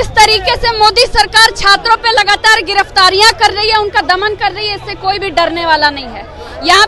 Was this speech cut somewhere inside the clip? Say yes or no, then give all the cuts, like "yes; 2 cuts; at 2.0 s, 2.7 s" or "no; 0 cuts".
no; 0 cuts